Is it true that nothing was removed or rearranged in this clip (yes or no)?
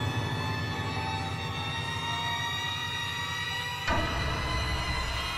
no